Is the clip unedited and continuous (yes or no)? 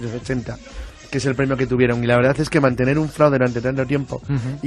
yes